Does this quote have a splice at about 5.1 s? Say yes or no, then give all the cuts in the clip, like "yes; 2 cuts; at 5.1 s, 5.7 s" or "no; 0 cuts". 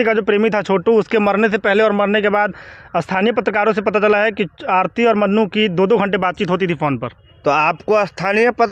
no; 0 cuts